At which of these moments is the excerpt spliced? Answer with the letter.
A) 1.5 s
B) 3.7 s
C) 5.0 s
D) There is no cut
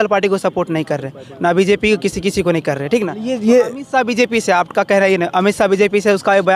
D